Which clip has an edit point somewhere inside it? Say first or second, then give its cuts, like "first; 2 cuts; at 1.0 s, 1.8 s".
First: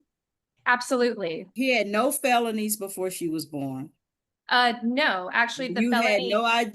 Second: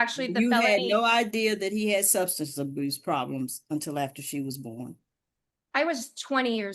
first; 1 cut; at 1.5 s